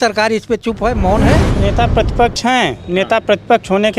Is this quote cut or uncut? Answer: cut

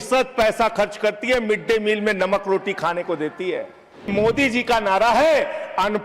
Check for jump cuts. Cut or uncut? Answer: cut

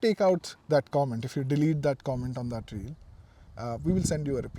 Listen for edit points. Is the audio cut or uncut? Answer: uncut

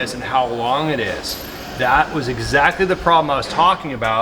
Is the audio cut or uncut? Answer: uncut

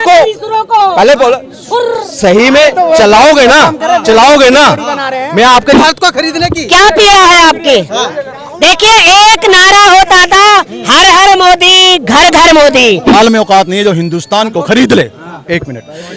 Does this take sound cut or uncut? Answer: cut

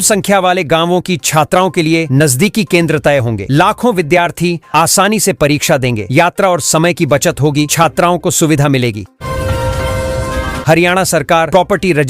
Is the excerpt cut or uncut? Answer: cut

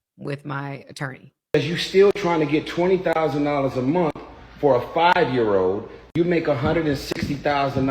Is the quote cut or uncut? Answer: cut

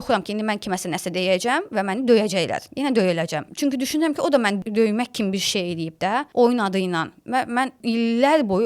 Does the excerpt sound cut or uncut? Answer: cut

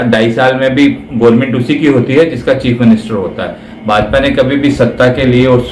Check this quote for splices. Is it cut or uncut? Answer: uncut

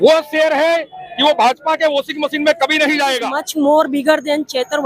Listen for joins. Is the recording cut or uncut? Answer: cut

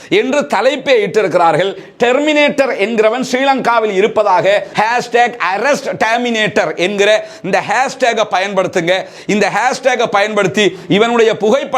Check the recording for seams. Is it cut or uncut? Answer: cut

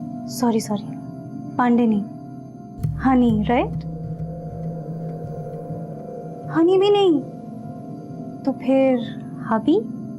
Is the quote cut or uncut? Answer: uncut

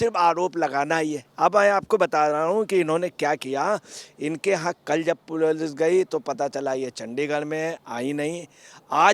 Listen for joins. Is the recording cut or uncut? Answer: uncut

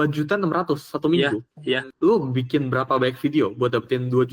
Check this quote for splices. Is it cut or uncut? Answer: cut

